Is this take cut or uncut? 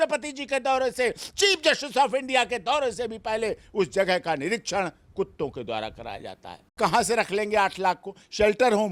cut